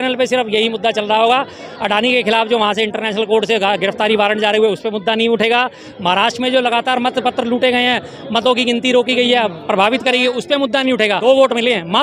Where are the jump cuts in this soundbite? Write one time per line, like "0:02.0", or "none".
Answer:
0:05.9
0:11.2